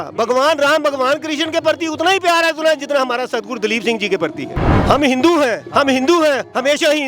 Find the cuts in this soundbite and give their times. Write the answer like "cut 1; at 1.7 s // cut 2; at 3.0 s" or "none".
cut 1; at 4.7 s